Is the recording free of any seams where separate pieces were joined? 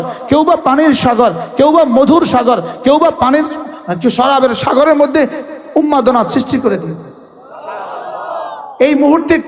yes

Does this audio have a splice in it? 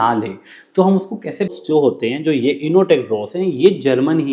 yes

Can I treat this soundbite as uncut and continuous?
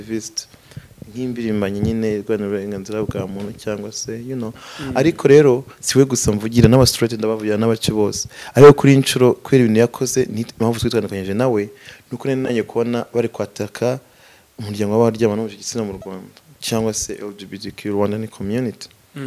yes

